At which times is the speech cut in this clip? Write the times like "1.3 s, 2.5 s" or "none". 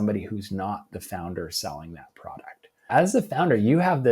2.9 s